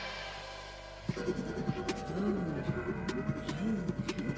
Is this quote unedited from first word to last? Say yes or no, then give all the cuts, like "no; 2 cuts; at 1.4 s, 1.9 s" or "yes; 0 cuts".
yes; 0 cuts